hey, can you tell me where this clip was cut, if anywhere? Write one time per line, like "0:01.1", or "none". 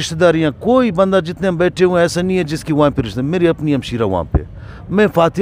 none